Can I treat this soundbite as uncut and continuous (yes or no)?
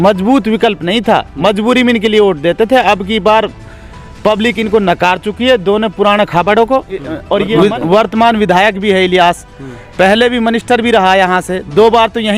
no